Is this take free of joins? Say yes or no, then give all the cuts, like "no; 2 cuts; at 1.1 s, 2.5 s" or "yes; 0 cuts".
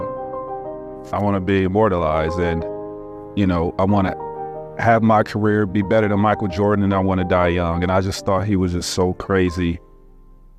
yes; 0 cuts